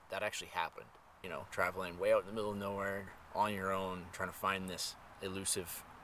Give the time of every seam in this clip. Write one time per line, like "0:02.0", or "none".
0:01.2
0:03.2
0:05.0